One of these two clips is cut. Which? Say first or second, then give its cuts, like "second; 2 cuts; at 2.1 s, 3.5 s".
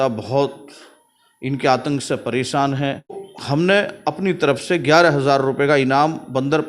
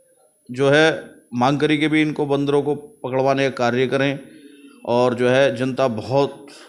first; 1 cut; at 3.3 s